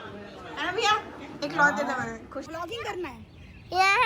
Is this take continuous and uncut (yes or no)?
no